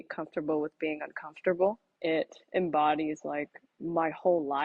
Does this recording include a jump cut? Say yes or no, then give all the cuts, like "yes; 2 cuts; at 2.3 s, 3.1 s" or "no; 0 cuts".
yes; 1 cut; at 1.9 s